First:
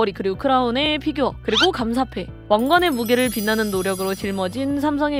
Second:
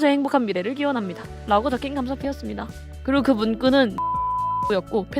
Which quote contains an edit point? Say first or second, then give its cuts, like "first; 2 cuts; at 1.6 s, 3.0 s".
second; 1 cut; at 4.2 s